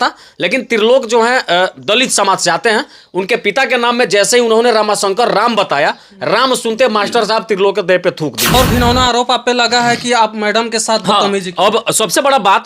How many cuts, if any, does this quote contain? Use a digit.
1